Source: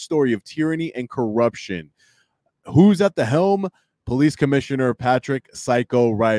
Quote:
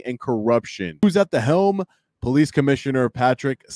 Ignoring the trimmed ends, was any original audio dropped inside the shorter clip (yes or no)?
yes